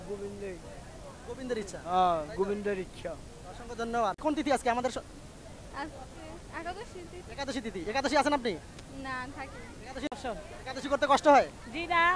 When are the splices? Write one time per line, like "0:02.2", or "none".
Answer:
0:04.2
0:10.1